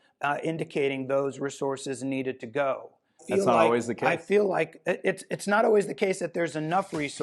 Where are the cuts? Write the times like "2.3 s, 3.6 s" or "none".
3.2 s